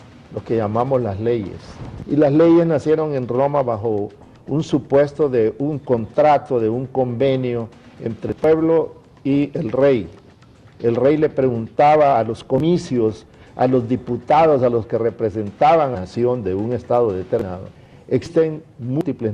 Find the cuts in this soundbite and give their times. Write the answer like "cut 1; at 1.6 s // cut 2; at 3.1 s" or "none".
none